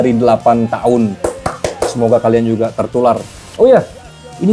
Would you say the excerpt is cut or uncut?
cut